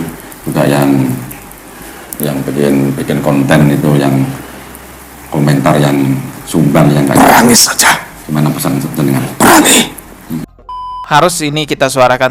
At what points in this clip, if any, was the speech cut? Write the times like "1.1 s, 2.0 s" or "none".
10.7 s